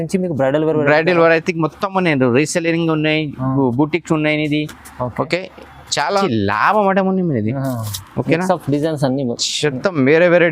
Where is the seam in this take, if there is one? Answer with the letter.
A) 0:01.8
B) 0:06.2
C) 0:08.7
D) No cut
B